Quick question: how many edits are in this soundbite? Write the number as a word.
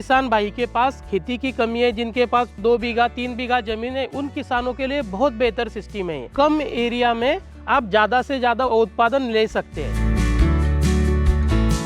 four